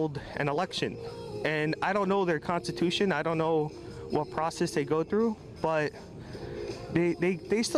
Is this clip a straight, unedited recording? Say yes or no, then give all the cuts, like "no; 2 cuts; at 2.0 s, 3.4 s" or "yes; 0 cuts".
yes; 0 cuts